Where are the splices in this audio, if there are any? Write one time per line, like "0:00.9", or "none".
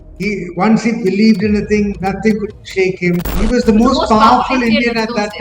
0:03.3

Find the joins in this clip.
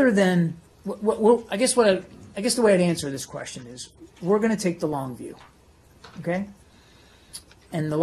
0:01.2

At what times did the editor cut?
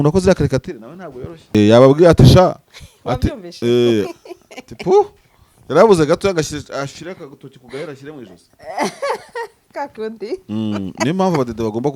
0:01.5

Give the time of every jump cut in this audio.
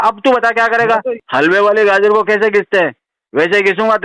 0:01.2

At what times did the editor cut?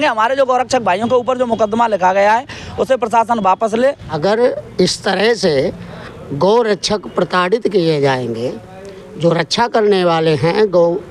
0:04.1

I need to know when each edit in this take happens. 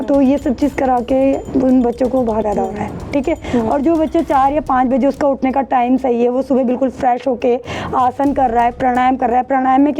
0:02.4

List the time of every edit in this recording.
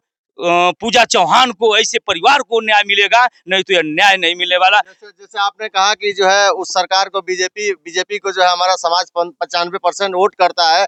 none

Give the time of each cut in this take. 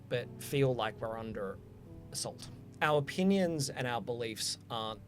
0:02.5

